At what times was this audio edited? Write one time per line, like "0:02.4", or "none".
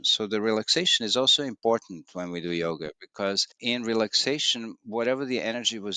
0:03.5

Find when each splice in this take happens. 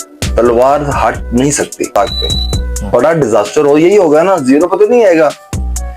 0:02.0

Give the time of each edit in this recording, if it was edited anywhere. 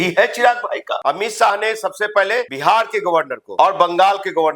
0:00.9
0:02.5
0:03.4

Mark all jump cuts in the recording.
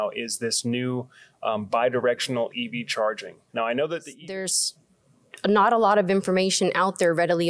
0:04.2

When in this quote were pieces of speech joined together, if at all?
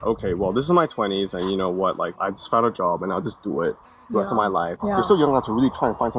none

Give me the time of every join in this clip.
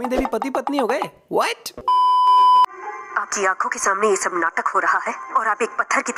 none

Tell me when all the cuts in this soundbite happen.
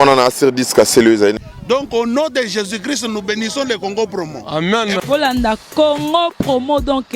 0:01.4

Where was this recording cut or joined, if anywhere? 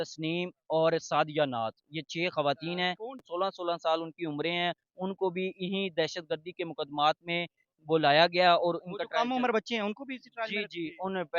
0:03.2

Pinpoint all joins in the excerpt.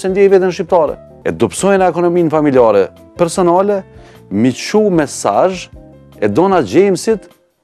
0:01.1

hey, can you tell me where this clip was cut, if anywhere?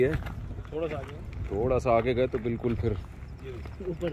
none

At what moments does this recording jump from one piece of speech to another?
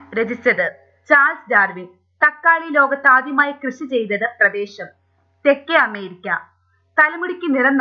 0:02.4

